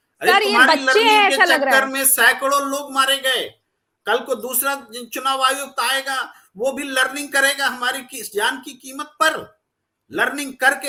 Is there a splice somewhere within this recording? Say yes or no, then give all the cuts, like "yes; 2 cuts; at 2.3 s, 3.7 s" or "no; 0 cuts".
no; 0 cuts